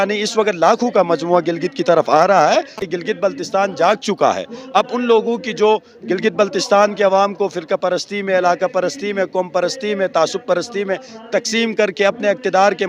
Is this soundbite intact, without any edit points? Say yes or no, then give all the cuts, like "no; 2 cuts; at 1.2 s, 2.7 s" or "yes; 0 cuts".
no; 1 cut; at 2.8 s